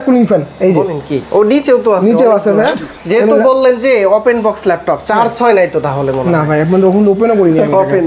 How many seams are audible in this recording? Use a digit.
1